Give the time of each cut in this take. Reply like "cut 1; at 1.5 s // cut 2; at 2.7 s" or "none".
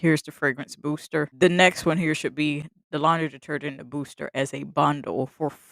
cut 1; at 1.3 s